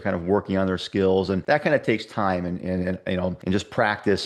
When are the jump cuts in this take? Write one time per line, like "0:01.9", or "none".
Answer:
0:01.4
0:03.4